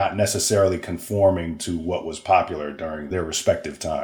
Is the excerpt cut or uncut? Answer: cut